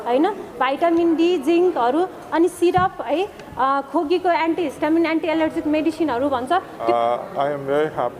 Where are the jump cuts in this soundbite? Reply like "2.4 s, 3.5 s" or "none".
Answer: 6.8 s